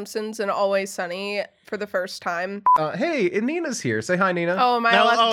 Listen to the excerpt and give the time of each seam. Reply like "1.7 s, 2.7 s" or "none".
2.7 s